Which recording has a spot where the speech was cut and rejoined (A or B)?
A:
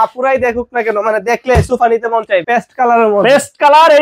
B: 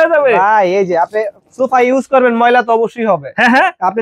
A